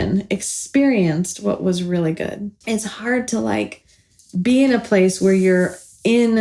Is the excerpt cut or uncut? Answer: cut